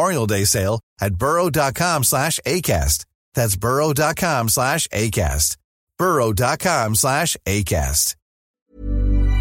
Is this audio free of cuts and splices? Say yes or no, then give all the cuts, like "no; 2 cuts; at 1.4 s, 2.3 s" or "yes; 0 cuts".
no; 1 cut; at 8.4 s